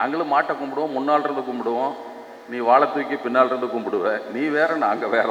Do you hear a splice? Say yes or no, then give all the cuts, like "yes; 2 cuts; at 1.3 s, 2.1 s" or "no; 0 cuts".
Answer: no; 0 cuts